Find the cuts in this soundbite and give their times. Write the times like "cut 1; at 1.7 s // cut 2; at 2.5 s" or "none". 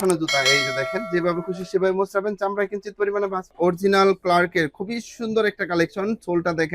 cut 1; at 3.5 s